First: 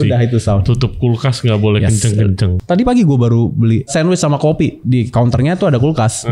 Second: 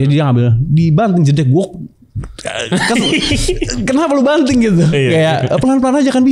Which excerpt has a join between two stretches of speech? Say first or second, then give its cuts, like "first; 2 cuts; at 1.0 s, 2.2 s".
first; 3 cuts; at 2.5 s, 3.9 s, 4.8 s